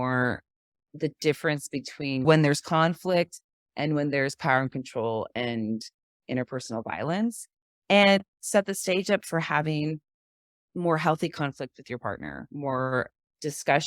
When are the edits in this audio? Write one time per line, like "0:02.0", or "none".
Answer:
0:02.2
0:08.4